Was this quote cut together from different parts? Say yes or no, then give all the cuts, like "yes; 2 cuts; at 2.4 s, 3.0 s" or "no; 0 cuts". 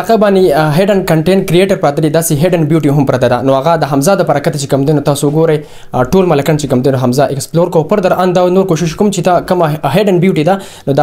no; 0 cuts